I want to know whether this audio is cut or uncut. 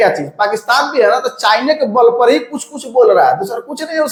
uncut